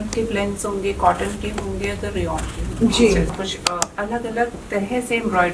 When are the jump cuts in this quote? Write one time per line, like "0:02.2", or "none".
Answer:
0:03.3